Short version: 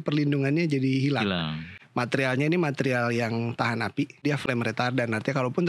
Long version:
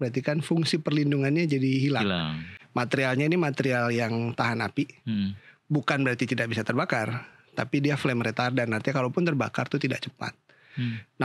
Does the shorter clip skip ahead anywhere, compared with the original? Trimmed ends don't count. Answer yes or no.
yes